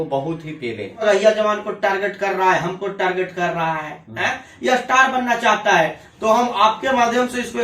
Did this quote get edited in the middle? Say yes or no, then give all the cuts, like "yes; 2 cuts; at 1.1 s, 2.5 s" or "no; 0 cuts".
yes; 1 cut; at 1.0 s